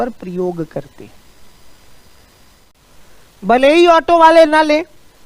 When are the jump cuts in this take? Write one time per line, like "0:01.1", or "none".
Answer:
0:02.7